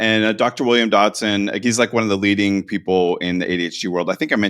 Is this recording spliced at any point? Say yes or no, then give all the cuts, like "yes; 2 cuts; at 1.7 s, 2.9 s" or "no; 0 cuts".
yes; 1 cut; at 1.6 s